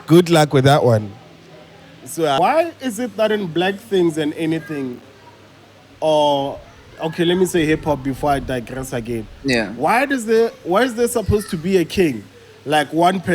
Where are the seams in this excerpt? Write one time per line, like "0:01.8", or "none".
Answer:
0:02.4